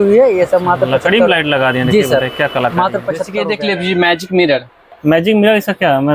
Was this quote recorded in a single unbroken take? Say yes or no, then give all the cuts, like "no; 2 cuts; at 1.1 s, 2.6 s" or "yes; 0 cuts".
no; 1 cut; at 3.3 s